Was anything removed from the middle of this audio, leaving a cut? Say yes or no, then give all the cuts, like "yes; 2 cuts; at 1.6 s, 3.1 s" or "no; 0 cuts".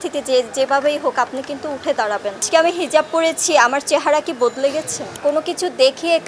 yes; 2 cuts; at 2.4 s, 5.0 s